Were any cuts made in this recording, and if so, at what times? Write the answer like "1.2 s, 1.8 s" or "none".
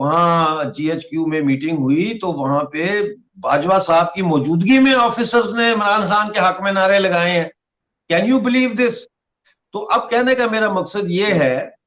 none